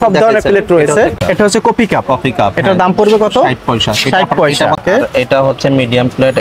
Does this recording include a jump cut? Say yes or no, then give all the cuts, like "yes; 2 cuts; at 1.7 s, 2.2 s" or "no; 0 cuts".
yes; 2 cuts; at 1.2 s, 4.8 s